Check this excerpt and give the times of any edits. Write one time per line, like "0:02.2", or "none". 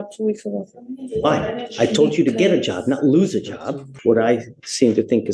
0:03.9

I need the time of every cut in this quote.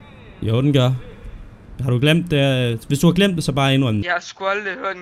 0:04.0

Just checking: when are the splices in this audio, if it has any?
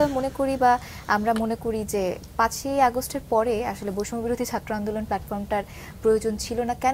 none

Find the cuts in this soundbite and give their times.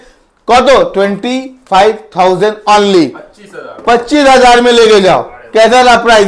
none

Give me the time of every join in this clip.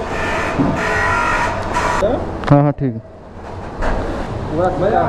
none

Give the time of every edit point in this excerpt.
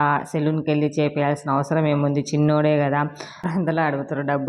0:03.5

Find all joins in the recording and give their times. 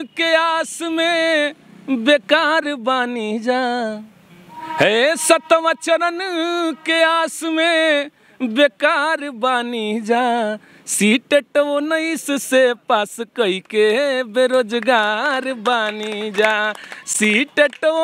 none

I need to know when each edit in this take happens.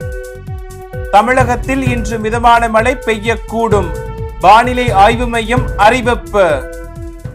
0:01.0

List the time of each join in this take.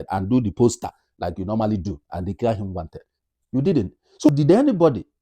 0:04.3

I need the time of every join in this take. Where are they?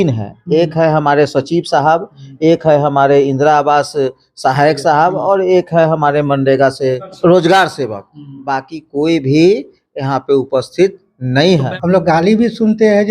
0:07.1
0:11.7

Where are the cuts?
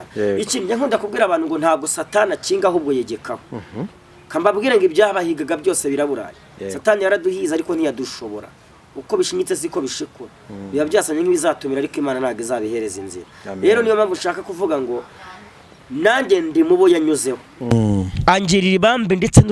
none

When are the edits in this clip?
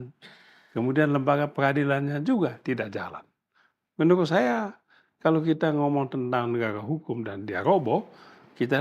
none

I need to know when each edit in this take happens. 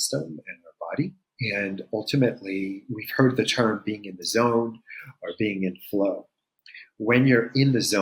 0:01.3

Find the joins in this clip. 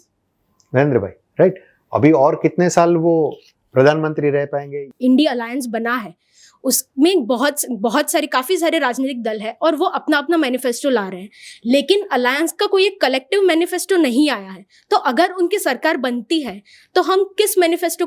0:04.7

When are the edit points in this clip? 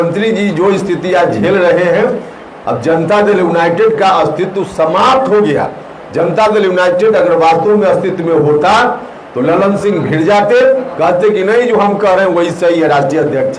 none

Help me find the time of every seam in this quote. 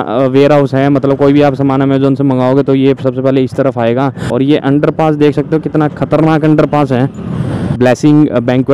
0:04.2
0:07.7

